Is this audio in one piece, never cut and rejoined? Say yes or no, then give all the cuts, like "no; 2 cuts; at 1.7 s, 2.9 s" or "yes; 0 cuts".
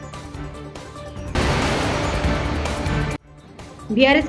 no; 2 cuts; at 1.0 s, 3.3 s